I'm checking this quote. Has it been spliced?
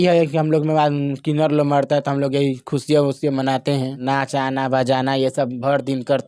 yes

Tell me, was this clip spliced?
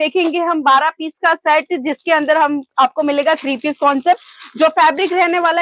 no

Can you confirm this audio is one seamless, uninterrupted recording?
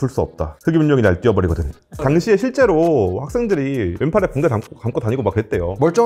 no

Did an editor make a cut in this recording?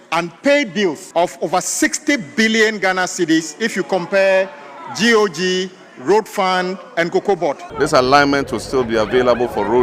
yes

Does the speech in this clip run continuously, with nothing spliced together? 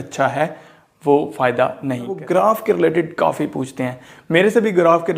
no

